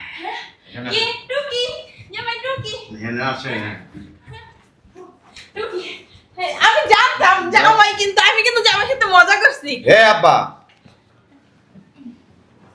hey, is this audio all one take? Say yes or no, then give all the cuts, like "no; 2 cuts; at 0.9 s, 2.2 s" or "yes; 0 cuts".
yes; 0 cuts